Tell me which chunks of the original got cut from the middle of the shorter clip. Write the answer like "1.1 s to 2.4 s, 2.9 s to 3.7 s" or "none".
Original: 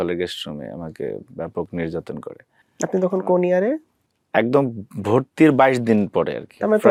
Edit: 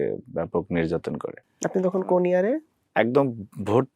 2.4 s to 2.6 s, 3.9 s to 4.1 s